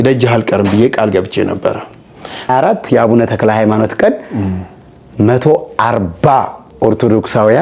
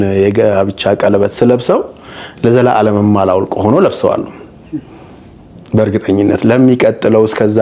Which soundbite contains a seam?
first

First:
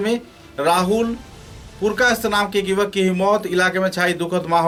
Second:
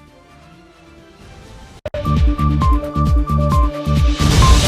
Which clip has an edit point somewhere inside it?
second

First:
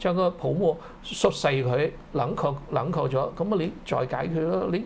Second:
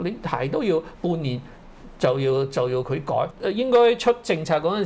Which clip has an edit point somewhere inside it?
second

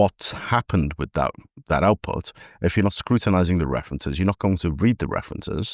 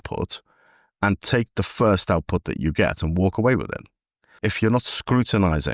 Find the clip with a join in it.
second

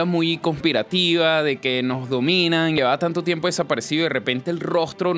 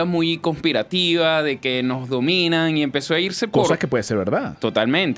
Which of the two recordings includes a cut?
first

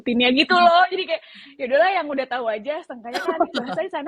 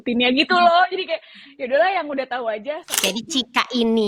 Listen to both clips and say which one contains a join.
second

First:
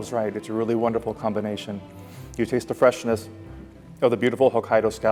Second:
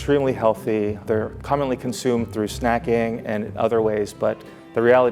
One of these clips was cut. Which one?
second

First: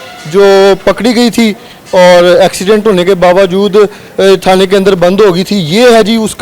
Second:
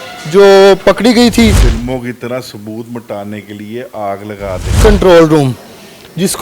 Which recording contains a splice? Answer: second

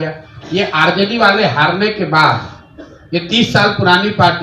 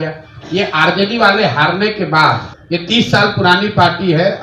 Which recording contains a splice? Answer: second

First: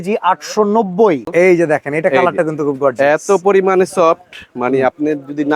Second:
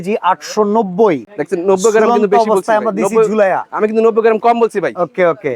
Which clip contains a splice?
first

